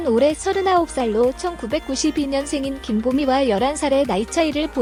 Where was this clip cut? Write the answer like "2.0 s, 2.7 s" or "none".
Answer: none

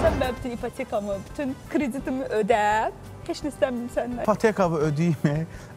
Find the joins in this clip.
4.2 s

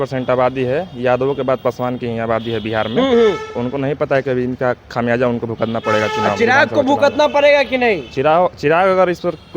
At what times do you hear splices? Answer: none

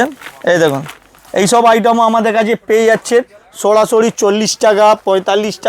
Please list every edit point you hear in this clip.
none

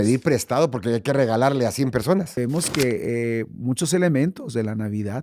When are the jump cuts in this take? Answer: 2.3 s

